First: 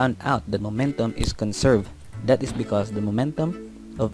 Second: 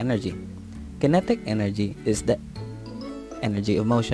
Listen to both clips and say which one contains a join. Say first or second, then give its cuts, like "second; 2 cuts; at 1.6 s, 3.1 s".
second; 1 cut; at 1.1 s